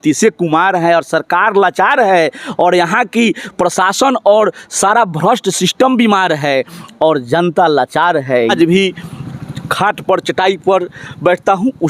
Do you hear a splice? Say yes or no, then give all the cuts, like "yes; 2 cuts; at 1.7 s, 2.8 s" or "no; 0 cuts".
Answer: yes; 1 cut; at 8.5 s